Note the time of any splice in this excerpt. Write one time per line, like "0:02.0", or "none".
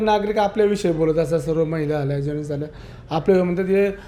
none